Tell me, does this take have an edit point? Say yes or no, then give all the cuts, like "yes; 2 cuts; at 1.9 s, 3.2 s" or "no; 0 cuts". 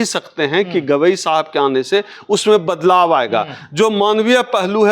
no; 0 cuts